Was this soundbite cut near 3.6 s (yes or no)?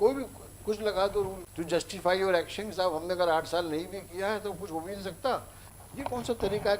no